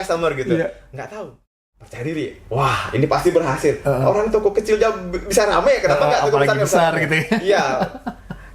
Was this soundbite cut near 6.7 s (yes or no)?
no